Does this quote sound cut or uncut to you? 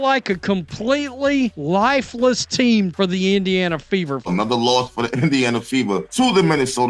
cut